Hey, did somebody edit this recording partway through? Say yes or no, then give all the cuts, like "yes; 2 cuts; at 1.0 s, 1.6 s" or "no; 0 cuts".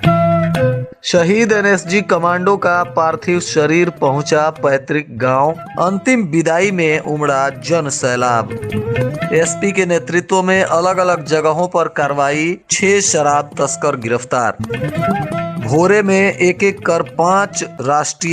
yes; 1 cut; at 0.9 s